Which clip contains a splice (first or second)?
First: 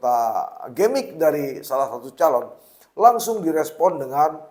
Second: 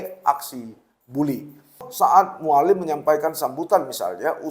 second